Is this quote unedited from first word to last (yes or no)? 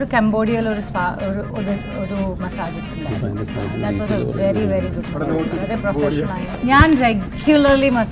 no